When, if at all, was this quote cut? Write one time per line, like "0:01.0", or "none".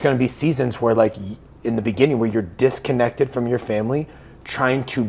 none